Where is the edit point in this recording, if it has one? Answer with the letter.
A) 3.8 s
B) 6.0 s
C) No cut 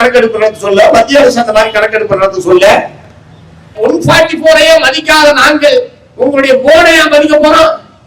A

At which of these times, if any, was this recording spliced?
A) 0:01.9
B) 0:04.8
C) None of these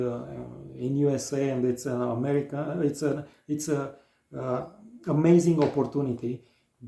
C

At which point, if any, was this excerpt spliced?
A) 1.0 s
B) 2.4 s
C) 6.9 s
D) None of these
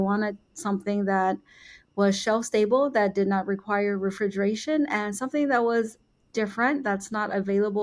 D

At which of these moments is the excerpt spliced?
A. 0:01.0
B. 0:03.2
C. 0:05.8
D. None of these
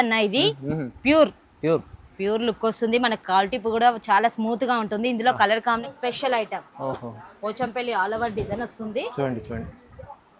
C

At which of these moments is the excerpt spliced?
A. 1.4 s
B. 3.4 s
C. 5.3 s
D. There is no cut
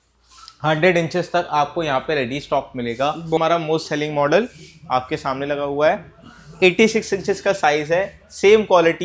B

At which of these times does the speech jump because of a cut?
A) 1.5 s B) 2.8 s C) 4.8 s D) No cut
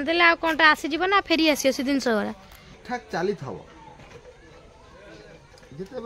B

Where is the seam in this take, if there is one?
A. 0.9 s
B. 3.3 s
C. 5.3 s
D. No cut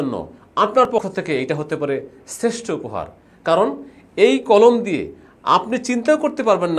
A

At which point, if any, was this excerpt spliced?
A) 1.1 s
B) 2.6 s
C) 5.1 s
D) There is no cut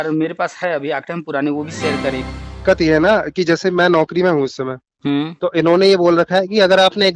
B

